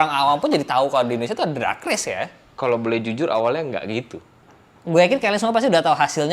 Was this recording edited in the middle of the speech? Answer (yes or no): yes